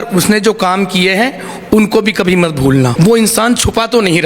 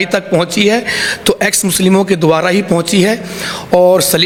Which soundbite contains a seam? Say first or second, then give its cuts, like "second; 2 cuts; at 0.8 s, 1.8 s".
first; 1 cut; at 2.9 s